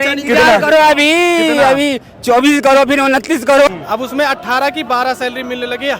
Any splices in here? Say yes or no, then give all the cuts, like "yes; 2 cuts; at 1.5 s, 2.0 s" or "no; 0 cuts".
yes; 1 cut; at 3.7 s